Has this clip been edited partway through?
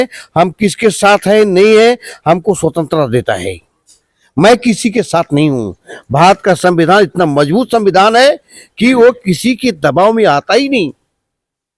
no; 0 cuts

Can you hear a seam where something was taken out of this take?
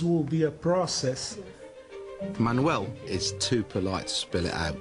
no; 0 cuts

